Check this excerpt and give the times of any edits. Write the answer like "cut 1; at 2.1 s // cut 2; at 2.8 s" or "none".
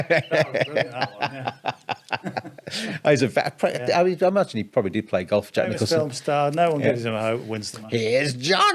none